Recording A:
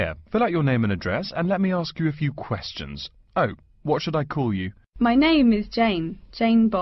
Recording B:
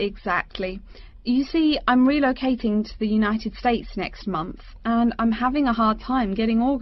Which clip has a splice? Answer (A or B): A